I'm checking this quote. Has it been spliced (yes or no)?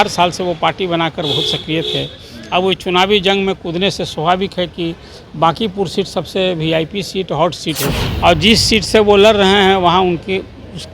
yes